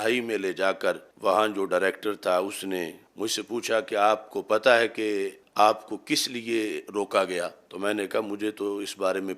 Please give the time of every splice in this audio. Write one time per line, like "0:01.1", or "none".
0:01.1
0:03.0
0:05.4
0:07.6